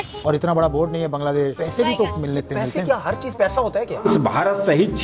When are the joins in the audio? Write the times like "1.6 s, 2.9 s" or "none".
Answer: 3.9 s